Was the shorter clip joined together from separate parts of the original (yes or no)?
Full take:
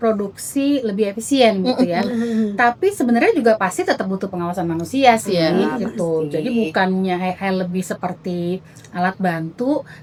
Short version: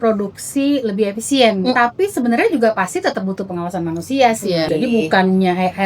yes